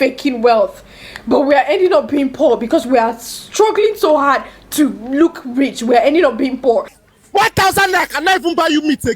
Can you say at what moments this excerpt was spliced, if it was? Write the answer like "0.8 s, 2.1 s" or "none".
7.0 s